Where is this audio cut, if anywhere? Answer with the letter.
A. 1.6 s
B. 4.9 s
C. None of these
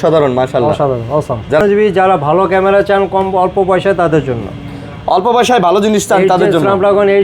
A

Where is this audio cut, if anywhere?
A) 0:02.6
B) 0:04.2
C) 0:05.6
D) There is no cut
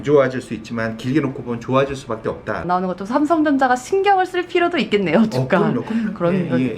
A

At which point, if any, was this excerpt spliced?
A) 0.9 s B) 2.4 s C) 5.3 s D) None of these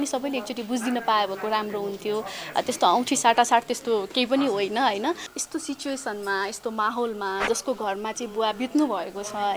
C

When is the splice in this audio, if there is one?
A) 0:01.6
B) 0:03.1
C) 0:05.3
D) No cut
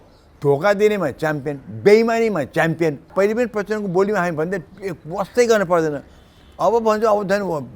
B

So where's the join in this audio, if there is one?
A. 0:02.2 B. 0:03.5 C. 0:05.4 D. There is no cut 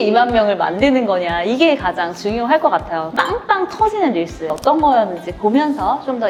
D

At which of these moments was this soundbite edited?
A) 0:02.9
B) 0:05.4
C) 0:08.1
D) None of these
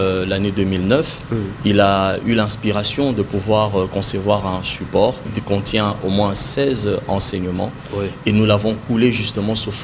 B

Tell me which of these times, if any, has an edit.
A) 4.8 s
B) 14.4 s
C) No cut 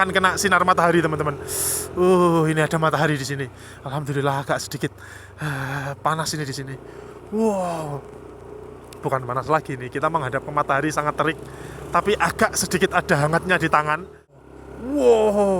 B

